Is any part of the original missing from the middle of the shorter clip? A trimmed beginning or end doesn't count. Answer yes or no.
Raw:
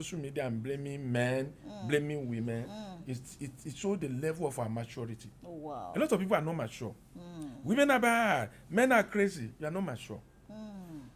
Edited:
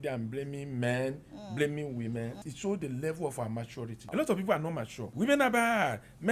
yes